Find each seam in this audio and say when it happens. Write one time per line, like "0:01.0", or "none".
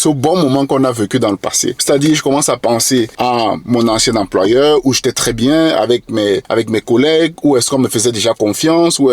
0:01.7
0:03.1
0:06.4